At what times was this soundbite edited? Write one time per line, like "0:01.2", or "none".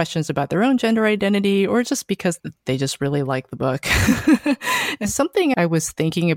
0:04.9

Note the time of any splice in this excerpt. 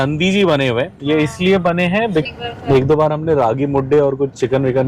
0:02.2

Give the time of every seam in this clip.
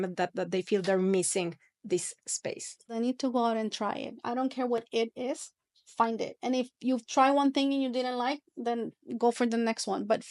0:02.9

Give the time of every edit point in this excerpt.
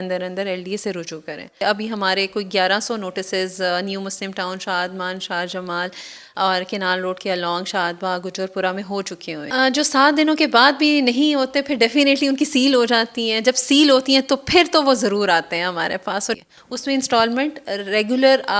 0:01.6
0:09.4
0:16.4

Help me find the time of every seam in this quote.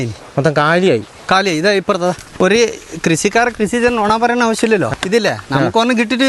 0:02.2
0:04.9

